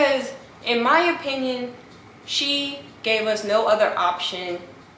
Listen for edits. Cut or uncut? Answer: uncut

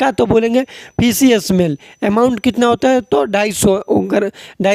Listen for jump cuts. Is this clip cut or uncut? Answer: uncut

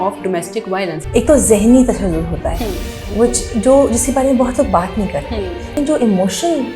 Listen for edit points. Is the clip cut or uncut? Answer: cut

